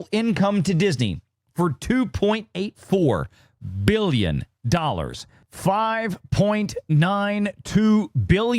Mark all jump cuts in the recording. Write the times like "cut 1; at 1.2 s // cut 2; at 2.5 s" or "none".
cut 1; at 5.4 s